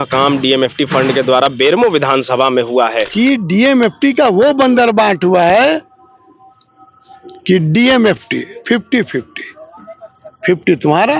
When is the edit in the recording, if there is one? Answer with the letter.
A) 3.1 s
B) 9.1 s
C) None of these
A